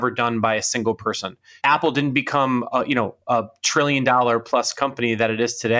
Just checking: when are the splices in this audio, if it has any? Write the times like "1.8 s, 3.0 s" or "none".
1.5 s